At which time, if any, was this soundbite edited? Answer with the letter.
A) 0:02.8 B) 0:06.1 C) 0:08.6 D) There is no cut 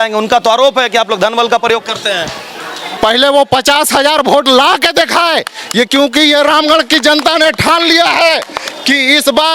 A